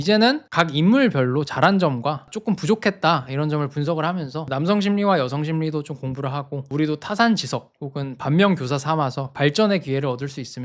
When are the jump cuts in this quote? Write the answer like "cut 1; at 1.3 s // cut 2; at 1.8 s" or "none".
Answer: cut 1; at 4.4 s // cut 2; at 6.6 s